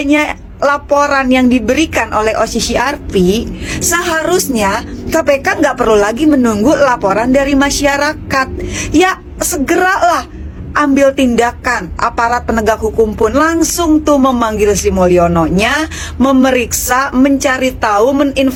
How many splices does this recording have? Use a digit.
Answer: 0